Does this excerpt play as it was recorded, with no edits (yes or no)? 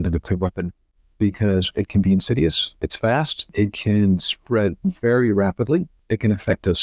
no